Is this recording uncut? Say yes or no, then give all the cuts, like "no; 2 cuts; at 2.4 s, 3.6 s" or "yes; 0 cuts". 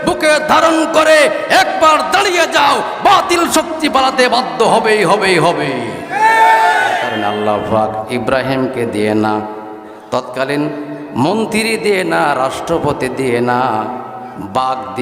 no; 1 cut; at 7.2 s